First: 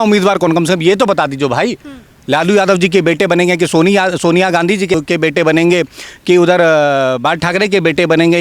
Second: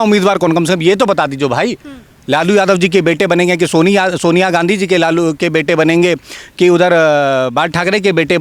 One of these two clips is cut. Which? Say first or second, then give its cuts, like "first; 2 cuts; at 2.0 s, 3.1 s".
first; 1 cut; at 5.0 s